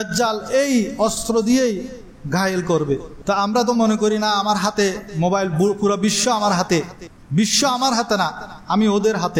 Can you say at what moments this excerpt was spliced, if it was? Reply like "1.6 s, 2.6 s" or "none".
3.1 s